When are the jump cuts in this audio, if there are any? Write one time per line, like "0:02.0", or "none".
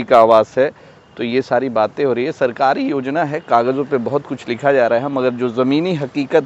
none